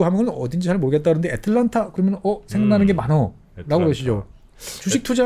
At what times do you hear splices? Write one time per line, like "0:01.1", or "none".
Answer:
none